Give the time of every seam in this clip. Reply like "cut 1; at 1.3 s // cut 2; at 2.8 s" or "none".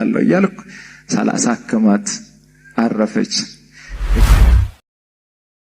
none